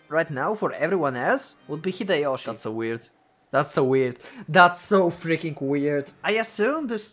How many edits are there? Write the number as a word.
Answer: two